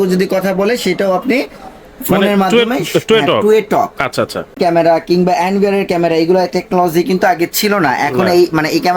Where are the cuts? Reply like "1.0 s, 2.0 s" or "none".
4.6 s